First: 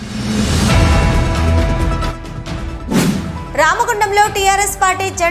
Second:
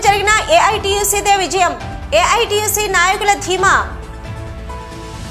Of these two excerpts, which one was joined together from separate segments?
first; 1 cut; at 3.0 s

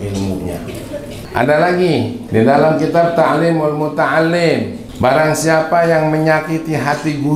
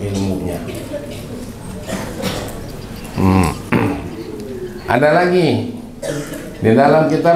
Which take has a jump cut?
first; 3 cuts; at 1.2 s, 2.2 s, 4.8 s

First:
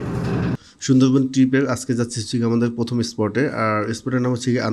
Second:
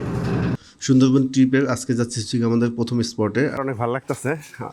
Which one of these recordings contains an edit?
second; 1 cut; at 3.5 s

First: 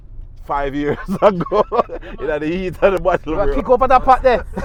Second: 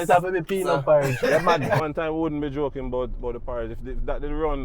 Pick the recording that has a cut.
second; 1 cut; at 1.8 s

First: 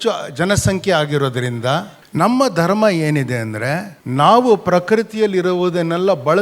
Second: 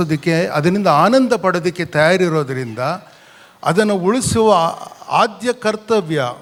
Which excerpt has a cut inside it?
first; 2 cuts; at 2.0 s, 4.0 s

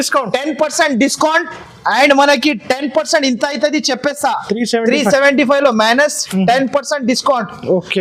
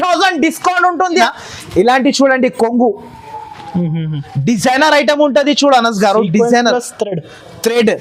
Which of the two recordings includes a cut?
second; 1 cut; at 1.3 s

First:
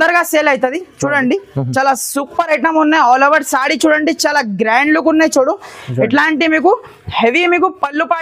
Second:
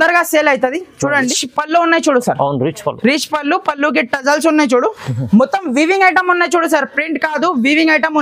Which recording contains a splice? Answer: second; 1 cut; at 1.3 s

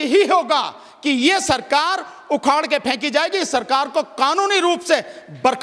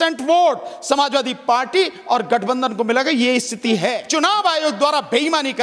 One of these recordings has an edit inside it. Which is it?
second; 1 cut; at 4.0 s

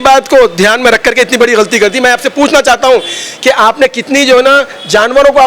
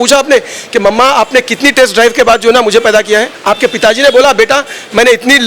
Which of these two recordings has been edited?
second; 1 cut; at 3.3 s

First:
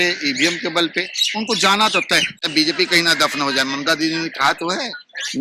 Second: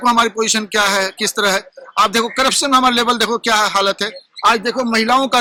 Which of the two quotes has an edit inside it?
first; 1 cut; at 2.3 s

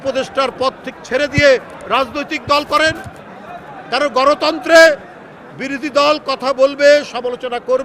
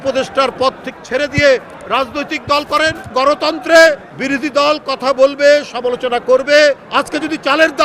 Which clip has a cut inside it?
second; 3 cuts; at 3.1 s, 4.1 s, 6.8 s

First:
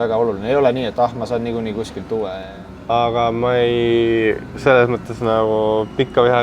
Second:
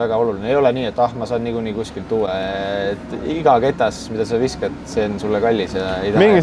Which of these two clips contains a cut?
first; 1 cut; at 2.4 s

